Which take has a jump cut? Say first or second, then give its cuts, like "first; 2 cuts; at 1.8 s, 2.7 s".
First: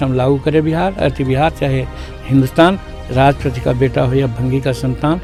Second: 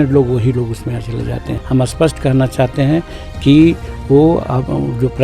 second; 1 cut; at 1.5 s